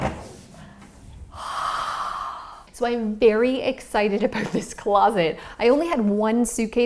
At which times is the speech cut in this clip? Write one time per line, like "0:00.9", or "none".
0:02.6